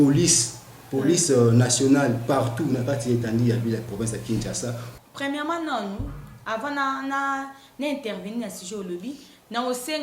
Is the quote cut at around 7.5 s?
no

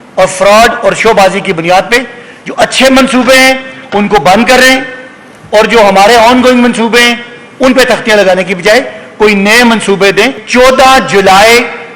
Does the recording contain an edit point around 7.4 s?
no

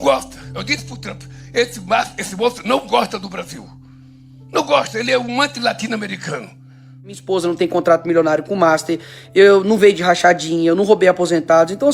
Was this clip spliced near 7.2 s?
yes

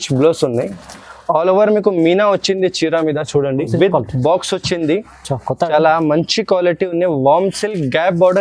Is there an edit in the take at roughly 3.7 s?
yes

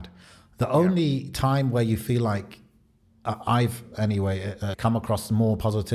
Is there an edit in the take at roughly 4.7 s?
yes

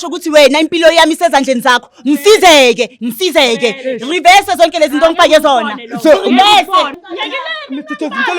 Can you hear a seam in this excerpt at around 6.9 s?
yes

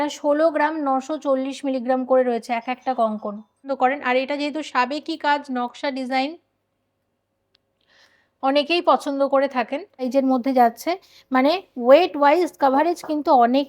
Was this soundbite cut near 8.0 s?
no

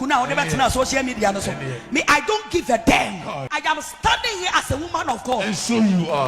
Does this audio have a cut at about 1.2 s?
no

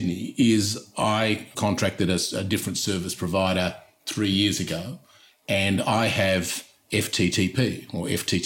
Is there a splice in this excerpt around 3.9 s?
no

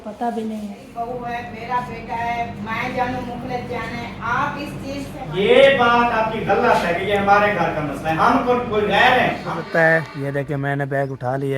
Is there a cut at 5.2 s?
yes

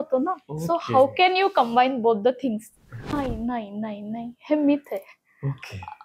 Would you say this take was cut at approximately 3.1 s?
yes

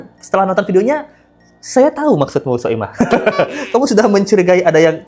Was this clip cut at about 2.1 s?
no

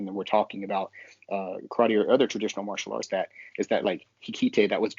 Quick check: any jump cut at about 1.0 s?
no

